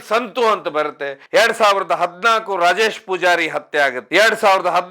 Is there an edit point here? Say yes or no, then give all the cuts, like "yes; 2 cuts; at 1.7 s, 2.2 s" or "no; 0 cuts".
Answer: yes; 2 cuts; at 1.1 s, 4.0 s